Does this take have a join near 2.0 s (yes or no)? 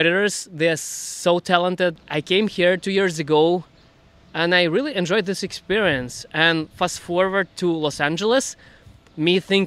yes